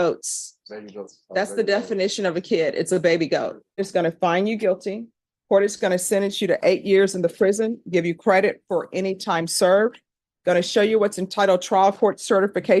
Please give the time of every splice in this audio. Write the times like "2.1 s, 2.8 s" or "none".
3.8 s

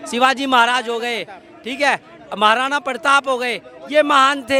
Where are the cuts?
none

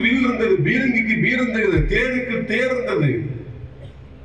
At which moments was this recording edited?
none

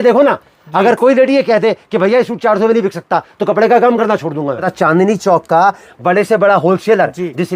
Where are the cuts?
4.7 s

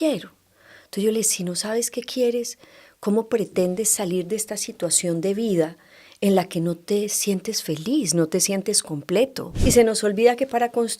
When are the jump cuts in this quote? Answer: 9.5 s

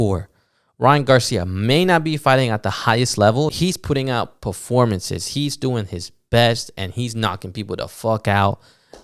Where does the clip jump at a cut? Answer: 3.5 s

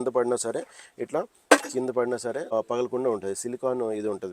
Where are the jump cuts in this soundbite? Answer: 2.4 s

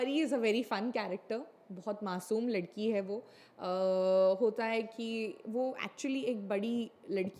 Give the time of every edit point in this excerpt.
none

